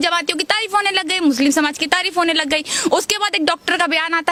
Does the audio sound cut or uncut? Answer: uncut